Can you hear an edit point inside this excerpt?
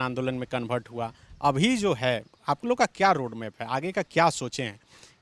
no; 0 cuts

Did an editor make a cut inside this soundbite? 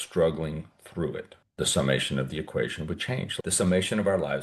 yes; 2 cuts; at 1.4 s, 3.3 s

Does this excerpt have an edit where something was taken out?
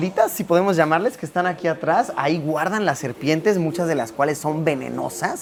no; 0 cuts

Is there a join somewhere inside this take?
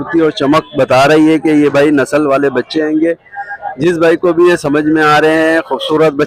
no; 0 cuts

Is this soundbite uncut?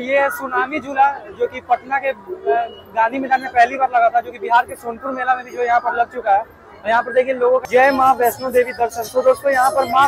no; 1 cut; at 7.7 s

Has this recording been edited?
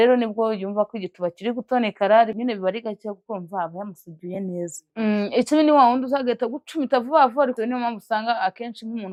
no; 0 cuts

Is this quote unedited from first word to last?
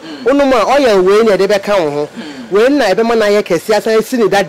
yes; 0 cuts

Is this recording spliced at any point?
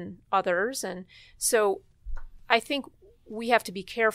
no; 0 cuts

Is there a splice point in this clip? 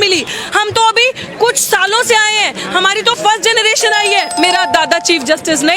yes; 1 cut; at 4.3 s

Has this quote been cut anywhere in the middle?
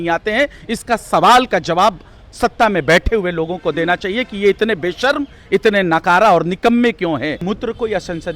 yes; 1 cut; at 7.4 s

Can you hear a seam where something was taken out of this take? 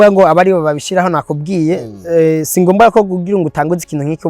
no; 0 cuts

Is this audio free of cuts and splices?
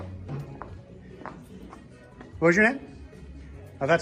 yes; 0 cuts

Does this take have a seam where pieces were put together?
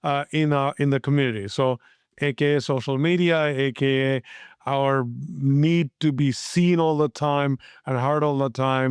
no; 0 cuts

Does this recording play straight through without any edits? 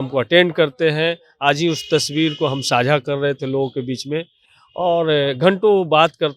yes; 0 cuts

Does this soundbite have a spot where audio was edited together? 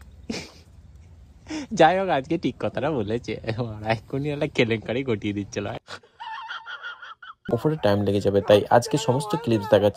yes; 1 cut; at 7.5 s

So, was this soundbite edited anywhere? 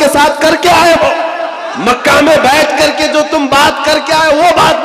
yes; 1 cut; at 1.6 s

